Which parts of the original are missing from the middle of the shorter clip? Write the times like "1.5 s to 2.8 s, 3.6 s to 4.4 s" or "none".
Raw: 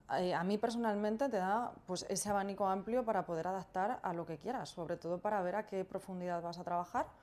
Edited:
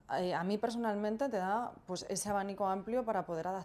none